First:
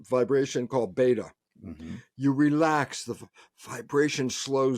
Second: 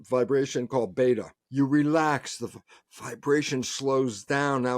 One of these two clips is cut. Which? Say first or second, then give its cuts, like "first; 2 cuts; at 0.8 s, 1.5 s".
second; 1 cut; at 1.4 s